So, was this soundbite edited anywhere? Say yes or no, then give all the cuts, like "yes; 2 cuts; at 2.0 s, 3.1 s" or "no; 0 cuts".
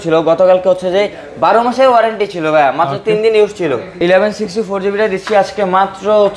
yes; 1 cut; at 3.9 s